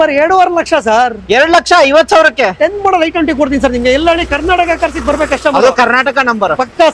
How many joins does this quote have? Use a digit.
0